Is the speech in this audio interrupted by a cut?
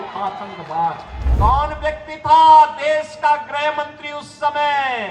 yes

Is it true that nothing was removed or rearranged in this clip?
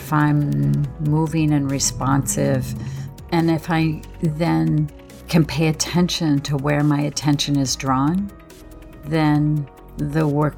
no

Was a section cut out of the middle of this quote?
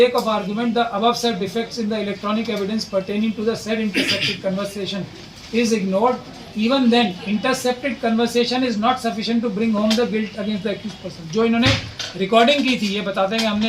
no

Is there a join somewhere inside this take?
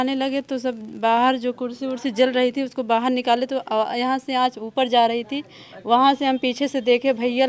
no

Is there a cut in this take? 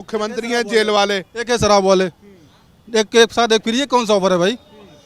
no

